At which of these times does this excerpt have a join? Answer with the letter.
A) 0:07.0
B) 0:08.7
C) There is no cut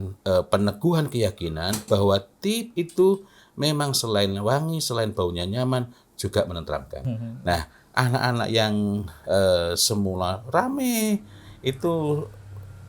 A